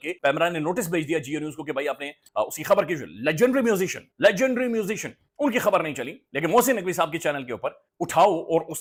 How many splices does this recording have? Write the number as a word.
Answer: zero